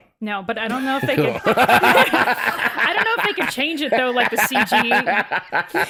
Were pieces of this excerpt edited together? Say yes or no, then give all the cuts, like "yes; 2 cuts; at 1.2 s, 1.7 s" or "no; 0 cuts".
no; 0 cuts